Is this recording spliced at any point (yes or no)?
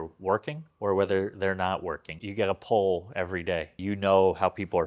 yes